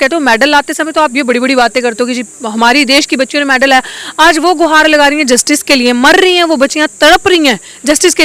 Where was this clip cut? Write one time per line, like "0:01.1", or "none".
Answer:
none